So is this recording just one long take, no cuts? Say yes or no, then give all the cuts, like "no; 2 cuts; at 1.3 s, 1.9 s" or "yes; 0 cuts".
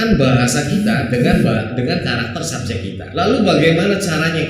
no; 1 cut; at 3.0 s